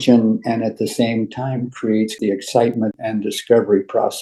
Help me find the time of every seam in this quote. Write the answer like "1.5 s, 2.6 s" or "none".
2.1 s